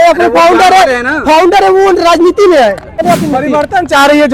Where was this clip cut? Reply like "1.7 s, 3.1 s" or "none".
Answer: 3.0 s